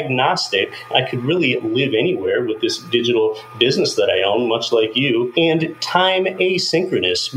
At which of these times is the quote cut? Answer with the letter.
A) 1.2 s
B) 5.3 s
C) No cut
B